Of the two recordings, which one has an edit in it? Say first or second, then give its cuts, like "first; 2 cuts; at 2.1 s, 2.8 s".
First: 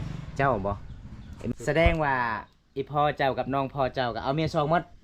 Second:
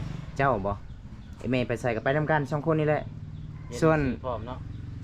first; 1 cut; at 1.5 s